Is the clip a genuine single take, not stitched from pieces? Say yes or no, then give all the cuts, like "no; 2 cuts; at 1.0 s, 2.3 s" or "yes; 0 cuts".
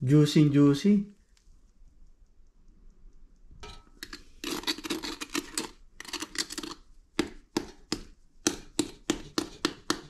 no; 1 cut; at 3.7 s